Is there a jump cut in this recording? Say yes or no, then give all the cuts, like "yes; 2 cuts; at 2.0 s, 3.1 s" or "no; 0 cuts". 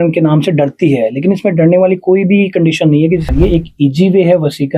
yes; 1 cut; at 3.3 s